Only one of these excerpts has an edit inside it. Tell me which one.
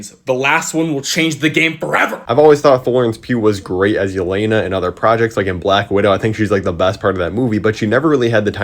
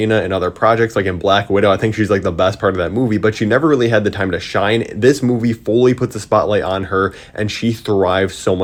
first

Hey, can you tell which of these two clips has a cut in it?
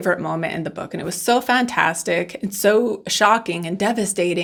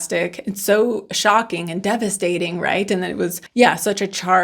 second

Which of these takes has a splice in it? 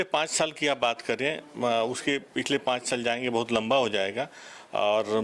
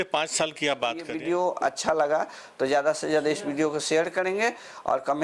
second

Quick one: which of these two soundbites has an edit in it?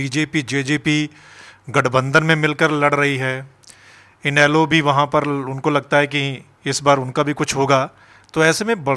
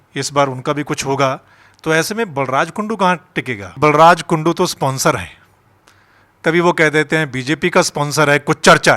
second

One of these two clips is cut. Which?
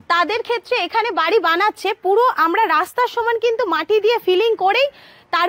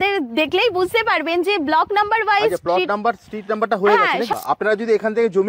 second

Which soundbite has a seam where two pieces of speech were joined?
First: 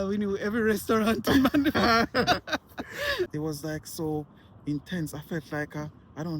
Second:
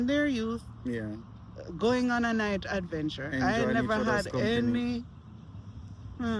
first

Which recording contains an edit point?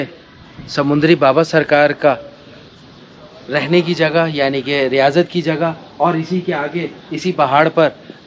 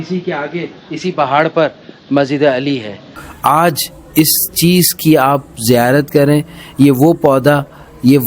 second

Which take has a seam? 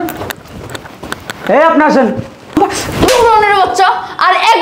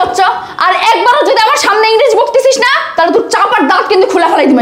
first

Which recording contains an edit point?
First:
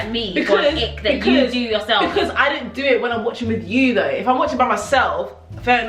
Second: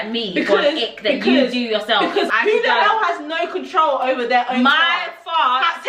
second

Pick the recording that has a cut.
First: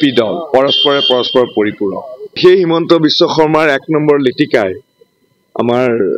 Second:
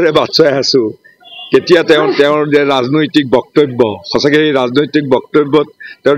first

